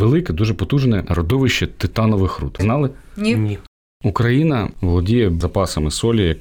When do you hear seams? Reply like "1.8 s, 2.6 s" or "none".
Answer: 1.1 s, 2.5 s, 3.7 s, 4.7 s